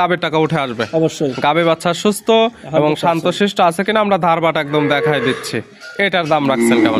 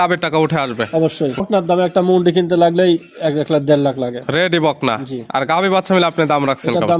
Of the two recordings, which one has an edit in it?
second; 1 cut; at 1.4 s

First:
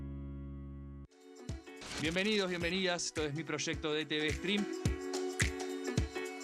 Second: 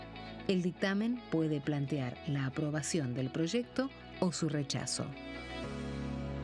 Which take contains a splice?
first; 1 cut; at 1.0 s

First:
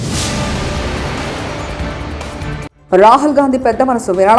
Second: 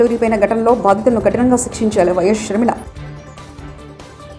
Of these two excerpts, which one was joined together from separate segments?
first; 1 cut; at 2.7 s

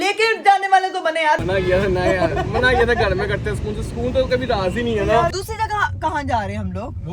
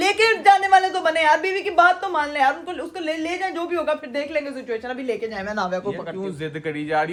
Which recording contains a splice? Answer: first; 2 cuts; at 1.4 s, 5.4 s

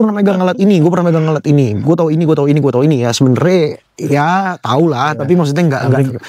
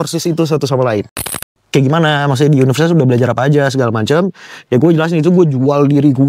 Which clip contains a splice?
second; 1 cut; at 1.4 s

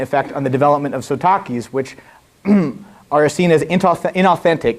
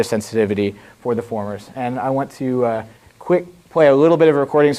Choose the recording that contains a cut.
first; 1 cut; at 2.1 s

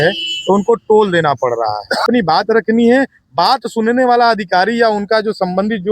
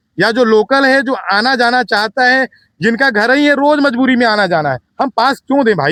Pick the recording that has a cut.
first; 1 cut; at 2.0 s

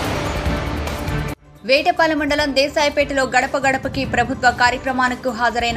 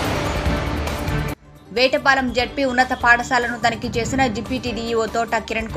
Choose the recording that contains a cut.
second; 1 cut; at 1.2 s

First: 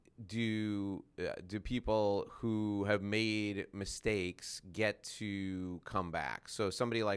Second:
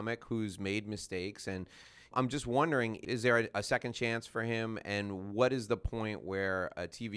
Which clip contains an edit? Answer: second; 2 cuts; at 2.1 s, 3.0 s

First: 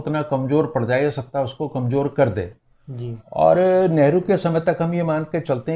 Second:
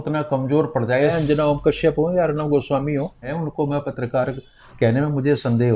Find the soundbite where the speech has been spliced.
second; 2 cuts; at 1.1 s, 3.3 s

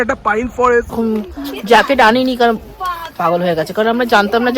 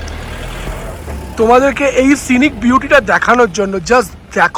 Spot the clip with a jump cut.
first; 1 cut; at 0.9 s

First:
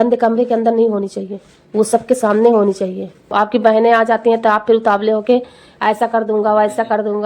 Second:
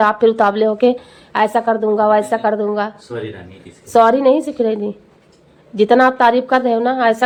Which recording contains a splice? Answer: first; 1 cut; at 3.3 s

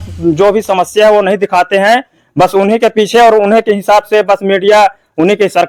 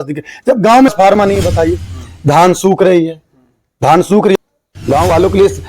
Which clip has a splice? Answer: second; 2 cuts; at 0.9 s, 4.3 s

